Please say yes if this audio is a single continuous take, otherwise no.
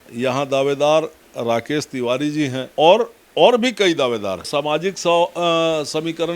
no